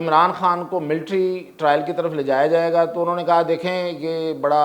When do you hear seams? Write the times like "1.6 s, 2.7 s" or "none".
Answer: none